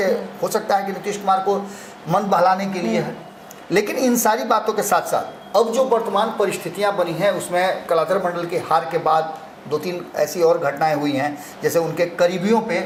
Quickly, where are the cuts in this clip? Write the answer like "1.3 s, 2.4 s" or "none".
none

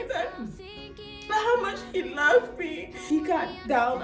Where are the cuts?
3.0 s

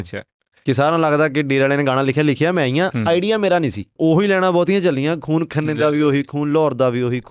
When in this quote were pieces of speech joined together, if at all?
3.8 s

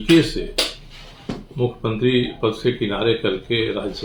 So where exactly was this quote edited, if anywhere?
none

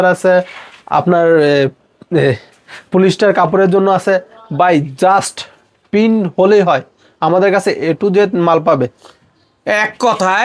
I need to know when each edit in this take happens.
none

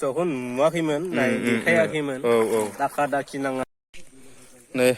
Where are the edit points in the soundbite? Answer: 3.6 s

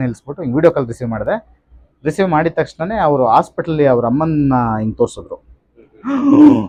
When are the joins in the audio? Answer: none

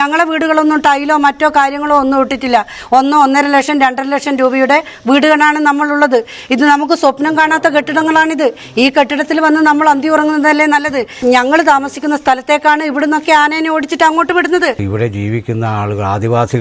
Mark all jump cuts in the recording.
11.2 s, 14.8 s

